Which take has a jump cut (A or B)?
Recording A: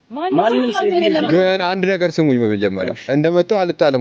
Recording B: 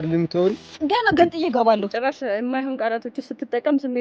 B